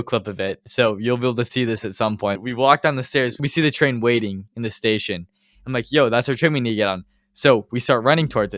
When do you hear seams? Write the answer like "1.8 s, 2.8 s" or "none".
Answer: 2.4 s, 3.5 s, 4.5 s